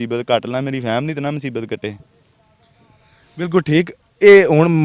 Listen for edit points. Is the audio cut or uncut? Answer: uncut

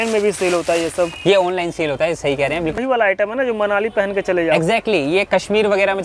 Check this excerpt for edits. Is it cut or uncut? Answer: cut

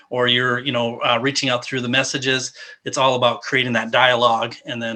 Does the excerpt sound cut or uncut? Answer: uncut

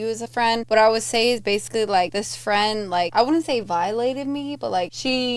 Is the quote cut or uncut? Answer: uncut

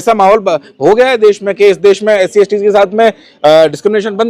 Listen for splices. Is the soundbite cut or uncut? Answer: uncut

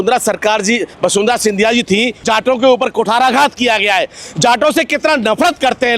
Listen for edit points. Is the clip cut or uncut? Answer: cut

